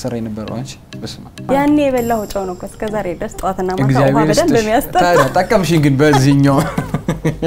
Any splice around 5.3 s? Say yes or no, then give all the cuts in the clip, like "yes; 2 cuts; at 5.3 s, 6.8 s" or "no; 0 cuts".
no; 1 cut; at 1.4 s